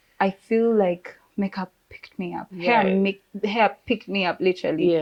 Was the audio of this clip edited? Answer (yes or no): no